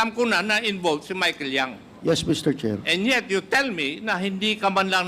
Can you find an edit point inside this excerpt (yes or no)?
yes